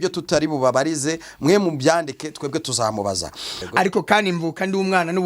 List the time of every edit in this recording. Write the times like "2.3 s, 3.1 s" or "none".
3.6 s